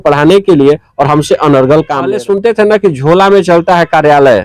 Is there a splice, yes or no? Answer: yes